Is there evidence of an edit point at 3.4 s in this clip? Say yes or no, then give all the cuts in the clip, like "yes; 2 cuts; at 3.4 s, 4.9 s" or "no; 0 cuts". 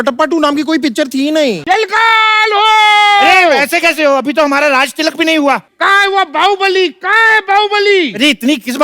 no; 2 cuts; at 1.6 s, 5.7 s